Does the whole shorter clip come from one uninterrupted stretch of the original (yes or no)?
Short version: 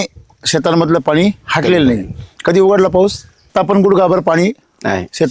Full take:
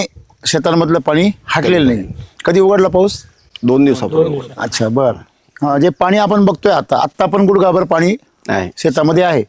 no